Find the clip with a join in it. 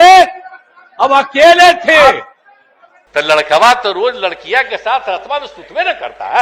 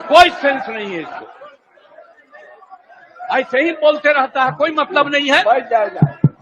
first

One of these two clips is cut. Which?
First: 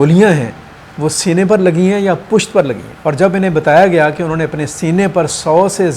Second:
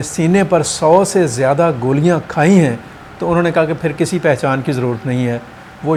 first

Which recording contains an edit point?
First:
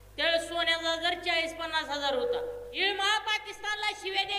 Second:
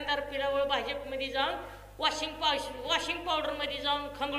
first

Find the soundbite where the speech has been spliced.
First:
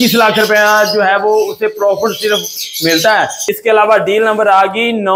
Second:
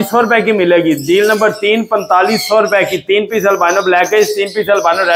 first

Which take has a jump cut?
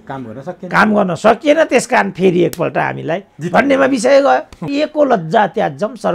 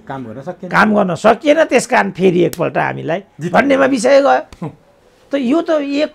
first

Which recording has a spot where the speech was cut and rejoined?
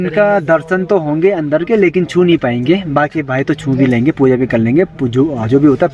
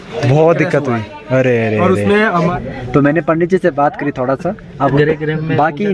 second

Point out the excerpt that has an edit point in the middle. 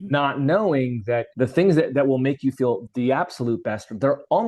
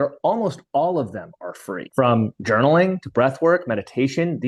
first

